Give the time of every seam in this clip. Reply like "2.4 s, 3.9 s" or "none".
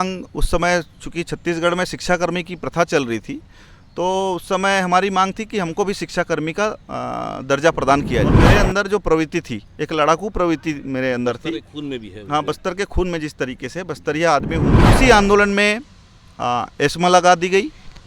8.3 s, 14.8 s